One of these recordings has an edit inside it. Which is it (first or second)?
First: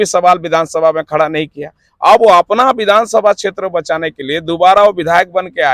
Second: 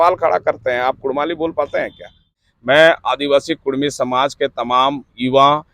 second